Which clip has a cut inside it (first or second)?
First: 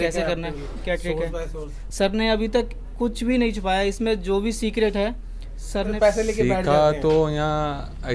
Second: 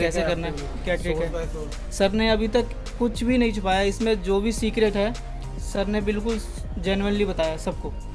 first